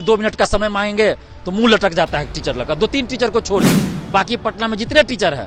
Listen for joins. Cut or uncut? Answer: uncut